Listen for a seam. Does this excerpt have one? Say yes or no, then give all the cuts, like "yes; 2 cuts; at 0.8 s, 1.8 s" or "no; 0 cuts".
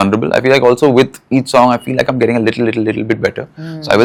no; 0 cuts